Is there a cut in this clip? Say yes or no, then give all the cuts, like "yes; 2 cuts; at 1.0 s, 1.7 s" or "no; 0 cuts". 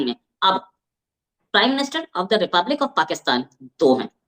no; 0 cuts